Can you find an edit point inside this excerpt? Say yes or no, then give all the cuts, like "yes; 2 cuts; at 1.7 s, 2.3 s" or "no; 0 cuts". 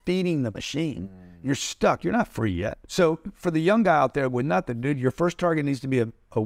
yes; 1 cut; at 2.8 s